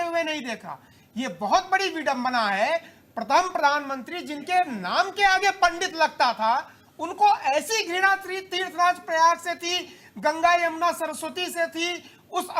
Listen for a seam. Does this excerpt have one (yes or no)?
no